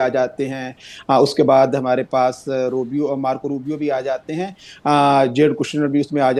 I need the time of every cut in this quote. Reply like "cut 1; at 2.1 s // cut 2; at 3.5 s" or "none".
none

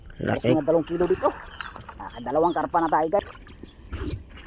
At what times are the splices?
cut 1; at 3.2 s

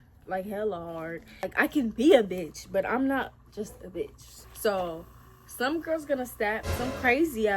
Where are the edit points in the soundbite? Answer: cut 1; at 1.4 s // cut 2; at 4.3 s

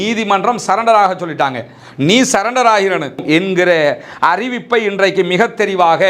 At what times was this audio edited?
cut 1; at 3.2 s

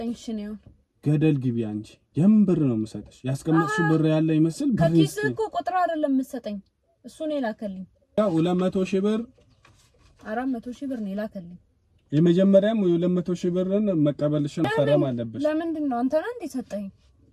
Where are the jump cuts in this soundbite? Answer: cut 1; at 8.2 s // cut 2; at 14.6 s

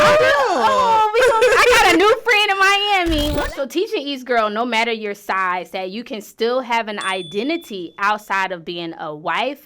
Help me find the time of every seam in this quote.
cut 1; at 3.4 s

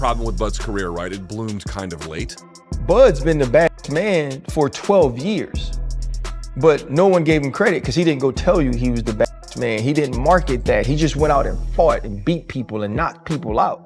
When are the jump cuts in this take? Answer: cut 1; at 2.3 s

